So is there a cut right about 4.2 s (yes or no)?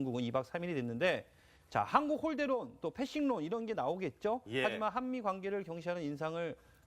no